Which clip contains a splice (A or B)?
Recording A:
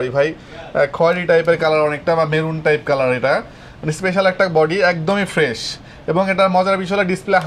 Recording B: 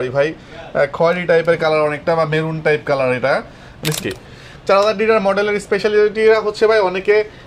B